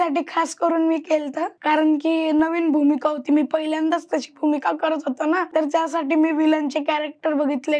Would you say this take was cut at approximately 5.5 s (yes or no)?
yes